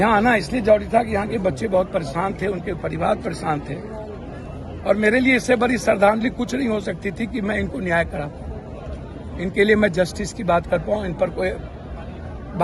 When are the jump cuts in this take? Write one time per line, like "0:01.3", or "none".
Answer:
none